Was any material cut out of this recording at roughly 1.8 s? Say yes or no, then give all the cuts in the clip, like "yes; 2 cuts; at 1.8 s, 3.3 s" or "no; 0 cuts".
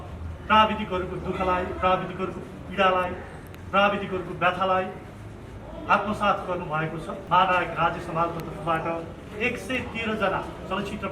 no; 1 cut; at 7.1 s